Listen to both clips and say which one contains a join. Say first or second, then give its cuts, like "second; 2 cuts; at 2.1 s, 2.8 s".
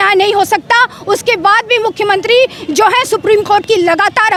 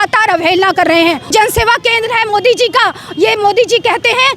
second; 1 cut; at 1.3 s